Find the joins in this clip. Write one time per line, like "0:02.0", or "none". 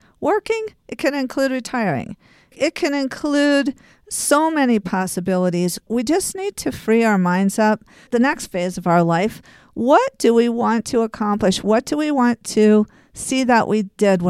0:02.5
0:05.9
0:08.1